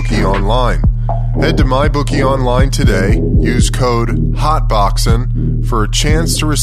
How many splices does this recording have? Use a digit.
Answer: 0